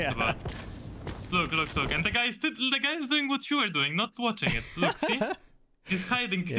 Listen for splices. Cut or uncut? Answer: uncut